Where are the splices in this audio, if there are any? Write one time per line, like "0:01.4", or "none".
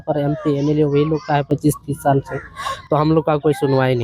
none